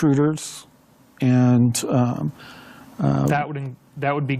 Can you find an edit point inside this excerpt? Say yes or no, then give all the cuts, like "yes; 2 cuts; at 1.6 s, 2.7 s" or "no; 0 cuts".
no; 0 cuts